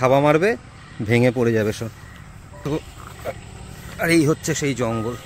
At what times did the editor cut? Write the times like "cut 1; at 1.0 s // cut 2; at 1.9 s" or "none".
cut 1; at 2.4 s